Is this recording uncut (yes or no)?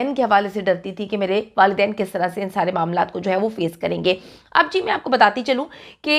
yes